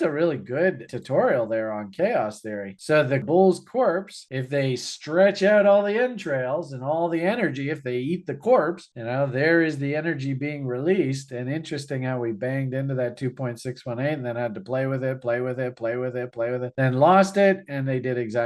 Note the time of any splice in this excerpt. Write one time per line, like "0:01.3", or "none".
0:00.9
0:03.2